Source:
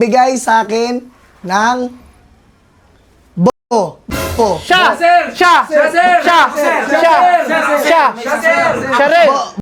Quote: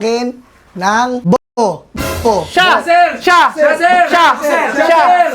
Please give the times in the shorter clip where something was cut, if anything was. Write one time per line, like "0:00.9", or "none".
0:01.2

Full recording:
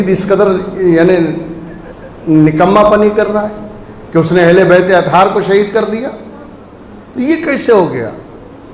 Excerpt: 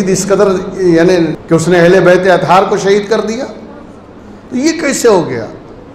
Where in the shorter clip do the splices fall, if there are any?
0:01.4

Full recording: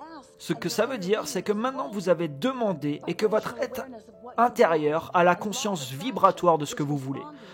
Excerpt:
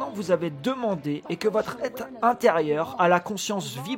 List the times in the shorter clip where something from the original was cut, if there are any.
0:02.0

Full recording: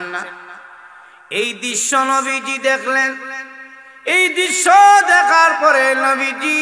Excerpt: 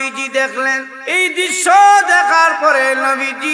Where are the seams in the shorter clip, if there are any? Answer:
0:00.9

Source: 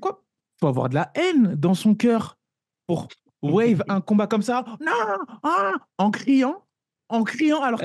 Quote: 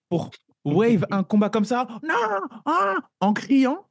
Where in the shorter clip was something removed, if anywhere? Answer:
none

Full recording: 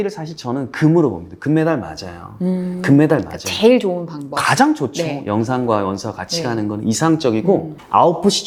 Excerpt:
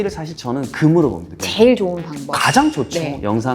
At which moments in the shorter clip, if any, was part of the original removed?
0:01.3

